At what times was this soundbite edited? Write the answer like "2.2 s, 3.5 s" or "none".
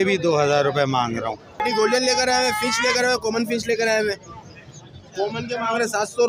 1.5 s